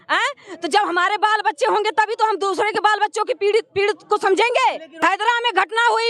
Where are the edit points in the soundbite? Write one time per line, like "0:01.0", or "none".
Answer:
0:04.9